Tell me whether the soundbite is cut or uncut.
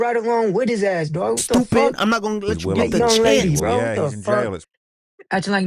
cut